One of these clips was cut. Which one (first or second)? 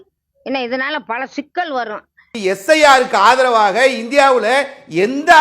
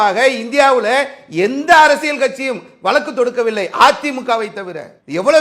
first